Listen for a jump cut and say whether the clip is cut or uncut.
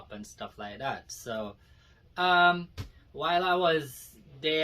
uncut